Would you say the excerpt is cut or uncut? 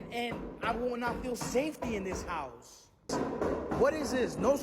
cut